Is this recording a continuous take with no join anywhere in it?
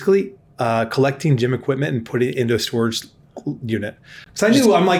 yes; 0 cuts

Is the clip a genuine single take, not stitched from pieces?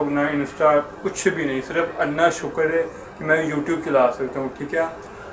yes; 0 cuts

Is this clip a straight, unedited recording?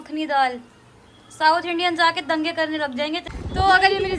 no; 1 cut; at 3.2 s

